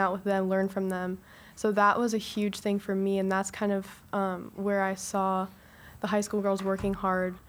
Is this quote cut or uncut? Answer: uncut